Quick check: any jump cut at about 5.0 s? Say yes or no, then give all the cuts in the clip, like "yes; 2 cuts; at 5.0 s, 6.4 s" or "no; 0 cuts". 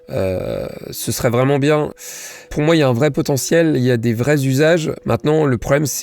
yes; 2 cuts; at 2.0 s, 5.0 s